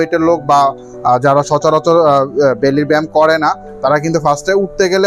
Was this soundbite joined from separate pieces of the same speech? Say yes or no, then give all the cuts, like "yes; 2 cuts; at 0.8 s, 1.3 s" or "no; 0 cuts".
no; 0 cuts